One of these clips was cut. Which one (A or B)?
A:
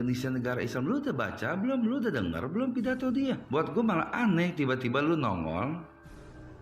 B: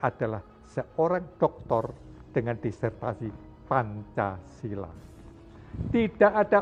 A